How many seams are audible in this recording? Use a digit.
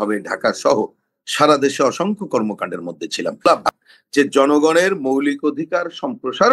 1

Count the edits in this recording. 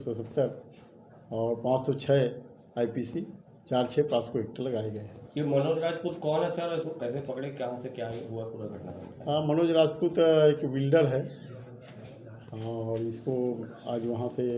0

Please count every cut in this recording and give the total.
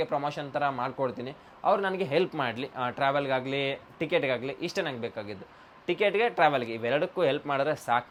0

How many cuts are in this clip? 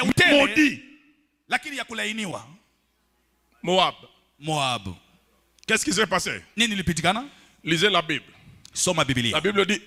0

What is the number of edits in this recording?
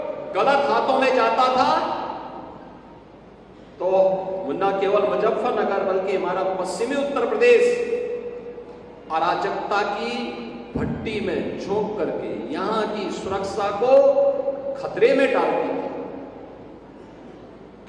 0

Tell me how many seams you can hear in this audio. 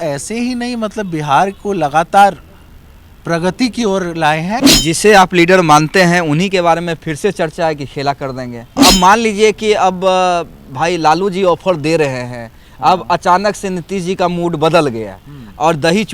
2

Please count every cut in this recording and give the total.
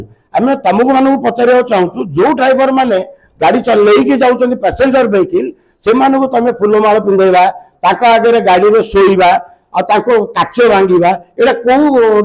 0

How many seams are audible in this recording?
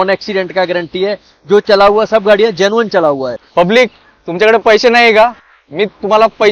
1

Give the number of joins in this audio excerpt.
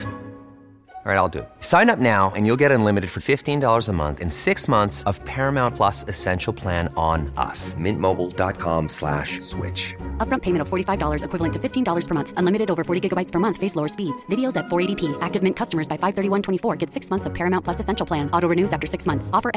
0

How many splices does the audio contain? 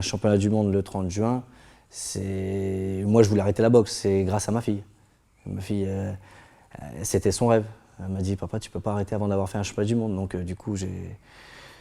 0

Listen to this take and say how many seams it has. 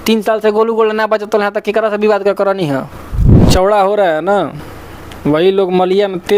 1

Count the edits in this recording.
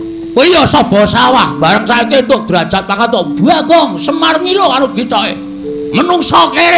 0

